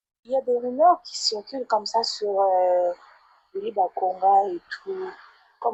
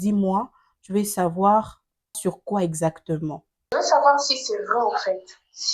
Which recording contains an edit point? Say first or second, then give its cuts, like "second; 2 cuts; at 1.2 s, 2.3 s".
second; 2 cuts; at 2.2 s, 3.7 s